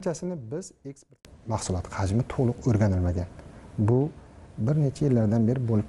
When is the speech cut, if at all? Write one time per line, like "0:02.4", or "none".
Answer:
0:01.2

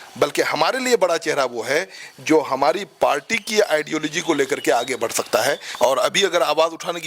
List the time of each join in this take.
0:05.7

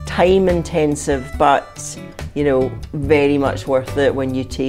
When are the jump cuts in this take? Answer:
none

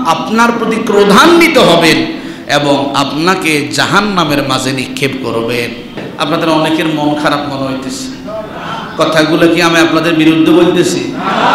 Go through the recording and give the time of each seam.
0:06.0

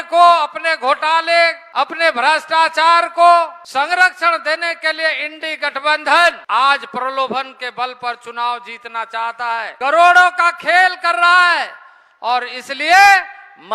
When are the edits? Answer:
0:01.6
0:03.6
0:06.4
0:09.7

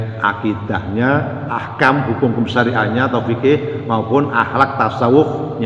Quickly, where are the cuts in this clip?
0:01.5

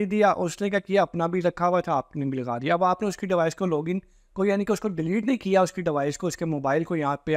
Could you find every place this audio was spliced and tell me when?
none

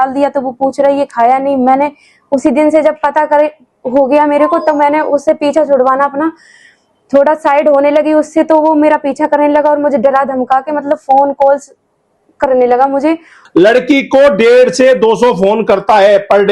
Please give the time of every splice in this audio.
0:13.3

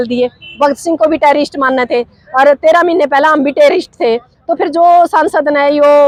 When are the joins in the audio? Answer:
none

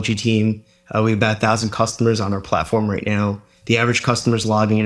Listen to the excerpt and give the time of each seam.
none

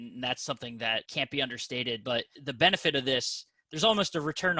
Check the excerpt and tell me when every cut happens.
0:01.1
0:02.4

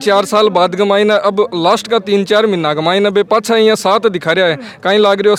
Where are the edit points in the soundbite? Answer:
none

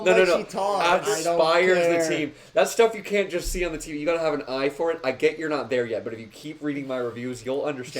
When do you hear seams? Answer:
0:01.0

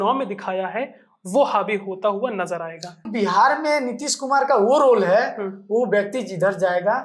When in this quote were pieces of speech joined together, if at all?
0:03.1

